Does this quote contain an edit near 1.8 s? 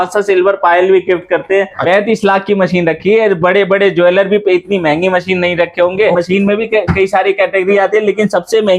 yes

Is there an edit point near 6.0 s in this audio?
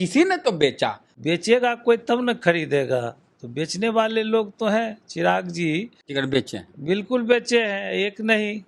yes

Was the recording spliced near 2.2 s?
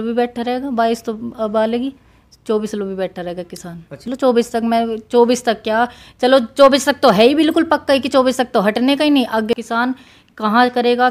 no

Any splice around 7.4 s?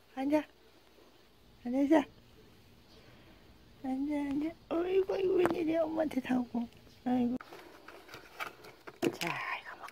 yes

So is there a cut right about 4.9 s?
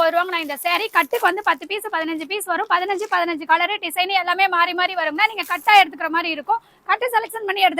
no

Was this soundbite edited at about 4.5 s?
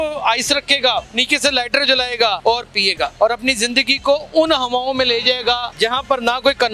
no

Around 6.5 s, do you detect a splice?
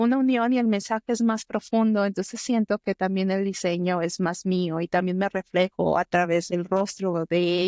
yes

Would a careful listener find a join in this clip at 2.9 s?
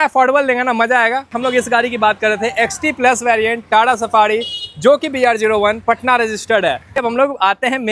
no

